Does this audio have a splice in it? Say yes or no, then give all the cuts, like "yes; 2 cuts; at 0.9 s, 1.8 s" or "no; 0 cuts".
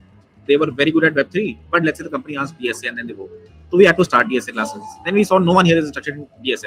no; 0 cuts